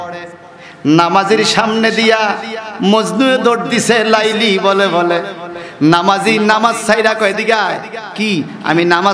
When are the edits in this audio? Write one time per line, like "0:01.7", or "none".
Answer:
none